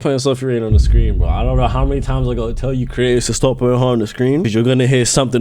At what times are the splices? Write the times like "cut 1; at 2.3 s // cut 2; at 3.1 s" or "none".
cut 1; at 4.5 s